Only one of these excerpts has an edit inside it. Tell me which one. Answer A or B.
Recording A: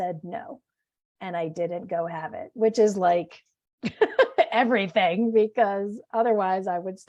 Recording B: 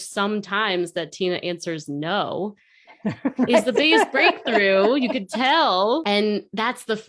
B